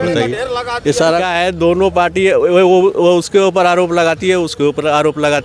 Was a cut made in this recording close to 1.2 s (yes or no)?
yes